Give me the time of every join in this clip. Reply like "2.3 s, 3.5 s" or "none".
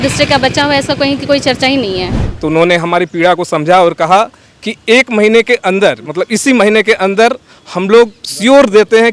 2.2 s